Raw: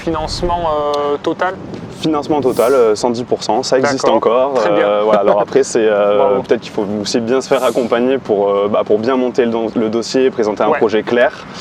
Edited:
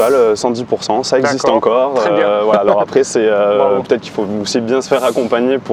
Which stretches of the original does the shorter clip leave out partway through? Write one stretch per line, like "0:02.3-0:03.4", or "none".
none